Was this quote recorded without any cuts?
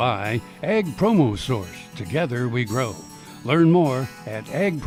yes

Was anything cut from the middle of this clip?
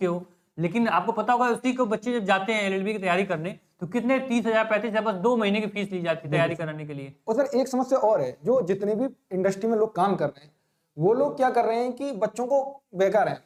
no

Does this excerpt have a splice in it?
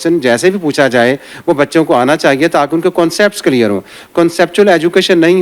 no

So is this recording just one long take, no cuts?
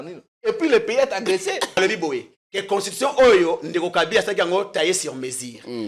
no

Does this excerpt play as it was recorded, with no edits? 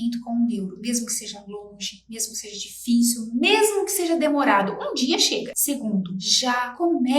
no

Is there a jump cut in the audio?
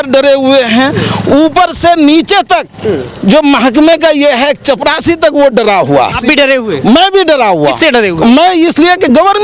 yes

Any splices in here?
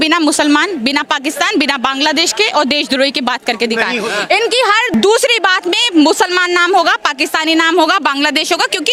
no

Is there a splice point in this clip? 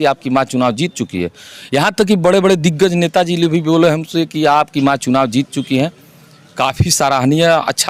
no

